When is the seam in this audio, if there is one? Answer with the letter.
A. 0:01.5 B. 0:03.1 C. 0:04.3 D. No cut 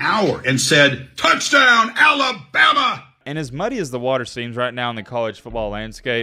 B